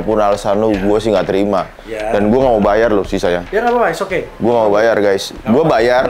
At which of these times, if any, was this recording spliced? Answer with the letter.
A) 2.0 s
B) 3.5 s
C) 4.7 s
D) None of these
D